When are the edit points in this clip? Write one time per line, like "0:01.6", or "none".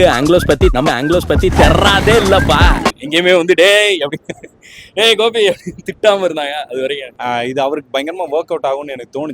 0:03.0
0:07.0